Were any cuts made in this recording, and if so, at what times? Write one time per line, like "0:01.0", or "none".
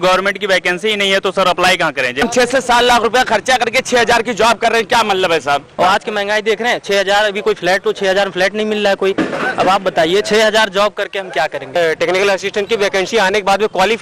0:02.2
0:05.8
0:11.8

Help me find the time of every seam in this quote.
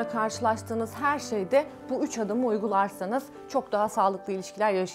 none

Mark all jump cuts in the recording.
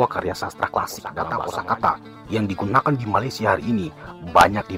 0:01.3

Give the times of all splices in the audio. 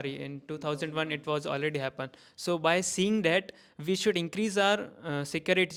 none

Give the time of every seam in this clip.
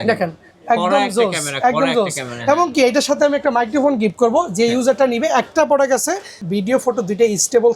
0:06.4

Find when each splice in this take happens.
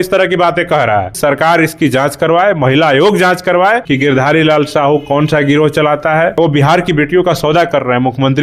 0:01.1
0:03.9
0:06.4

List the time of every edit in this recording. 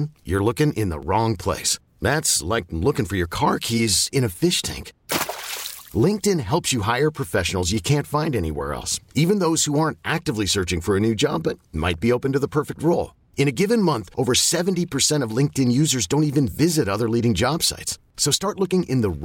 none

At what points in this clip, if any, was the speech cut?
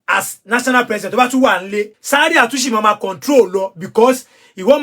0:02.0

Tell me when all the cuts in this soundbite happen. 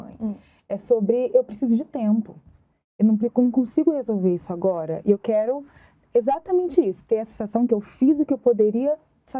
none

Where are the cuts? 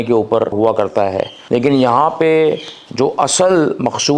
0:00.9

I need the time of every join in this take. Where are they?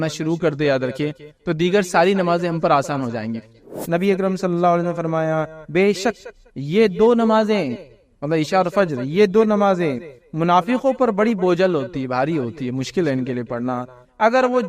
0:03.7

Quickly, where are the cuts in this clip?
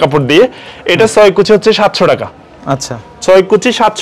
none

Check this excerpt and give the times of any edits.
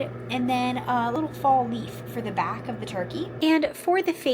0:01.1

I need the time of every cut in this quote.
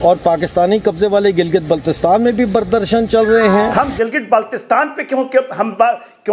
0:03.7

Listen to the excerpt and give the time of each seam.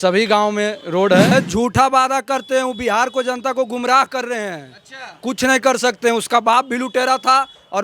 0:01.3

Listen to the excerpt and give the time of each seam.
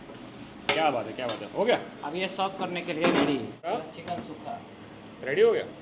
none

